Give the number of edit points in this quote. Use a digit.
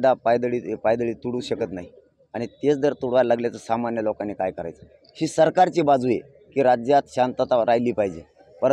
0